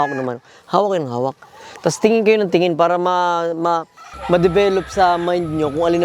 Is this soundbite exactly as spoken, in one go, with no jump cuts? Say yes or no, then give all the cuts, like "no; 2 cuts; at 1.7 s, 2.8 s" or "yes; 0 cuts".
yes; 0 cuts